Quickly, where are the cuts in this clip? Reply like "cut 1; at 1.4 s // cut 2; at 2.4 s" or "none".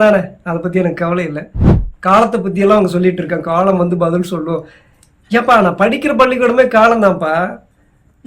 cut 1; at 1.7 s